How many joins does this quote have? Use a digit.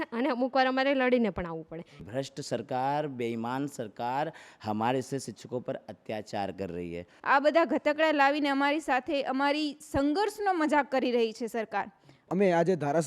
3